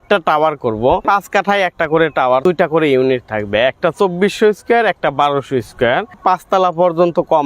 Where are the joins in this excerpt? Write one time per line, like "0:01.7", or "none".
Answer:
0:01.0
0:02.4
0:06.1